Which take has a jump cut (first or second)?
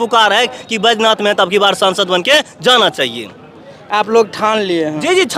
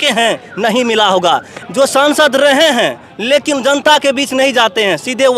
second